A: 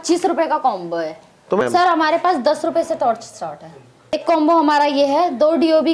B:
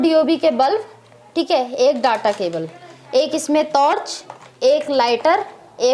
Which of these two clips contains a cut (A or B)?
A